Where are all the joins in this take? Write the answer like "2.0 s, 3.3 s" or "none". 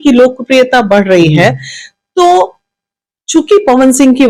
none